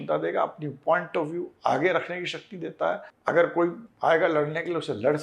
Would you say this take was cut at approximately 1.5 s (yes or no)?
no